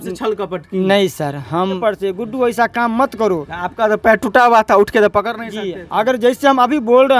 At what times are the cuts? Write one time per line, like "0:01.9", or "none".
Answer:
0:01.8